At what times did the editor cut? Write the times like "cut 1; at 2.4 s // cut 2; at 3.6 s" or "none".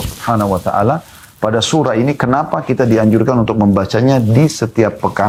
none